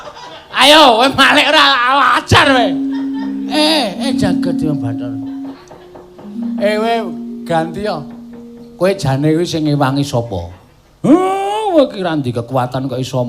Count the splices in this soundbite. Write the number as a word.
one